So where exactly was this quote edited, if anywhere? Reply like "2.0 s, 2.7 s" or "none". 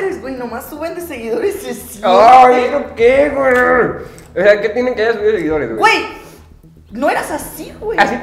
none